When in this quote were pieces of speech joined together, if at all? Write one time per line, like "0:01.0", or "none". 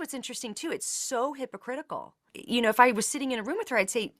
0:02.3